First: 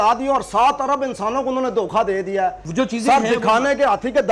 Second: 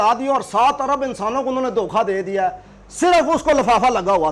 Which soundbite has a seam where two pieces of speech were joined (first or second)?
first